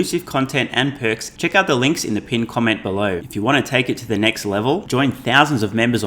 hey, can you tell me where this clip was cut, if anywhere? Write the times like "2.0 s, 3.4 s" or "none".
1.3 s, 3.2 s